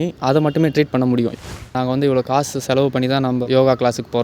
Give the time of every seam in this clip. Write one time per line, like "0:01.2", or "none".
0:01.3
0:03.4